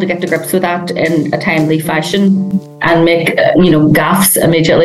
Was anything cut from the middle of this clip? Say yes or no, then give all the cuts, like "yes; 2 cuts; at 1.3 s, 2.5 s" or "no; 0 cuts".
no; 0 cuts